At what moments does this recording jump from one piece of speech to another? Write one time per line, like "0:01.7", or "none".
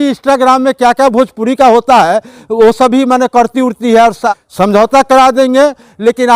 0:04.3